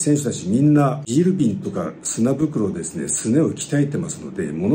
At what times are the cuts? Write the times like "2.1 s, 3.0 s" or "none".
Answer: 1.0 s